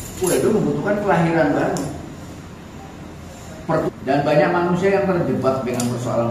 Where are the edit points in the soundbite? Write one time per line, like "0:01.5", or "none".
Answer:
0:03.9